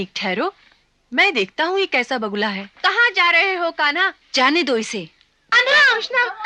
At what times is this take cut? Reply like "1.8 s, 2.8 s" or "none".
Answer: 4.2 s